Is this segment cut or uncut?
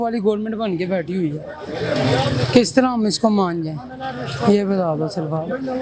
uncut